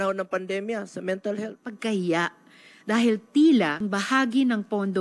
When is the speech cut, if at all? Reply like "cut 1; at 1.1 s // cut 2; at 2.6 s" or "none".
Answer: cut 1; at 1.6 s // cut 2; at 3.8 s